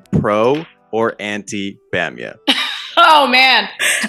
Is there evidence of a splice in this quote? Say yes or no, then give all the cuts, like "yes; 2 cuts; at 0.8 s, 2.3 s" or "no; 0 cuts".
no; 0 cuts